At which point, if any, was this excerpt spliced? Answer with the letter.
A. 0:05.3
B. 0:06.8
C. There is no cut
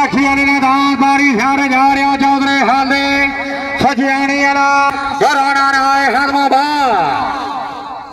A